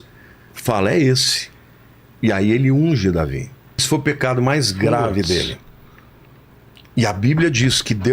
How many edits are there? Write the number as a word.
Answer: one